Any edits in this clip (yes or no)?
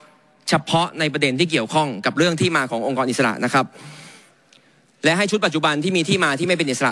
no